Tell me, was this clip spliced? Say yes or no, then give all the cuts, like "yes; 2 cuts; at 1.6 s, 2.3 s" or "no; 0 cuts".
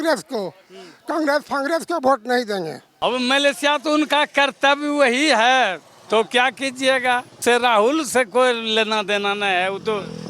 yes; 2 cuts; at 2.8 s, 7.4 s